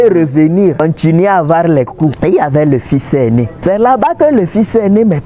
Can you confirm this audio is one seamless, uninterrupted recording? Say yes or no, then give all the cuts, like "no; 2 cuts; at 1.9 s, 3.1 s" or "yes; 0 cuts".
no; 3 cuts; at 0.8 s, 2.2 s, 3.5 s